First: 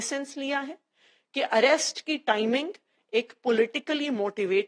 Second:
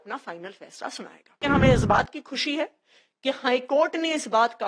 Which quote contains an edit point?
second; 1 cut; at 1.4 s

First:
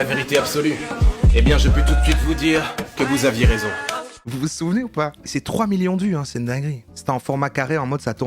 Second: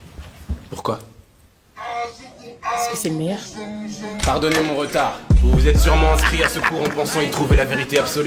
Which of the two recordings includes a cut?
first; 3 cuts; at 4.1 s, 5.1 s, 6.7 s

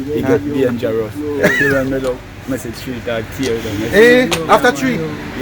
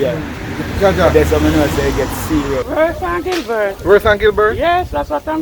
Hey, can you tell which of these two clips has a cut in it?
second; 1 cut; at 2.7 s

